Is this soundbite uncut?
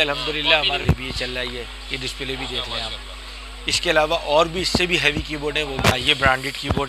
no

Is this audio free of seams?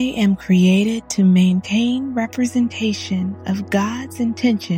yes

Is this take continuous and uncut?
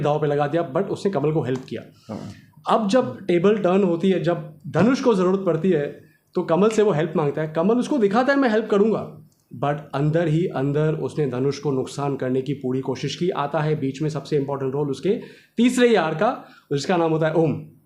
yes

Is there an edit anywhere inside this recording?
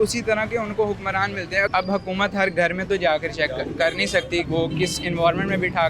yes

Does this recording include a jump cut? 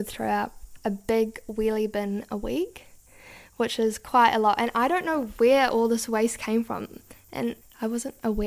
no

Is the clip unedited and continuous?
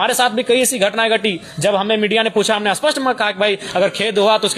yes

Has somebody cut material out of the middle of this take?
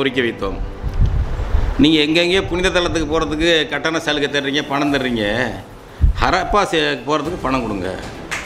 no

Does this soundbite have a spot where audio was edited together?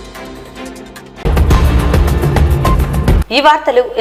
no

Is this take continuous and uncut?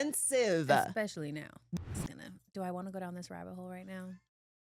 no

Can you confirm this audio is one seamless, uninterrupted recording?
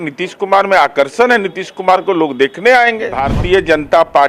no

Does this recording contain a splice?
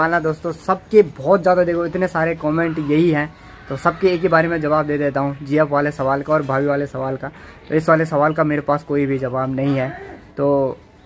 no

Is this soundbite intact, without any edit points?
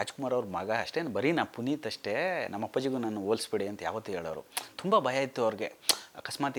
yes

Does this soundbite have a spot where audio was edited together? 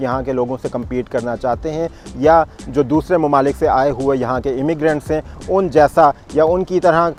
no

